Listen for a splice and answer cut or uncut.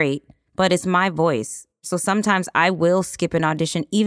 cut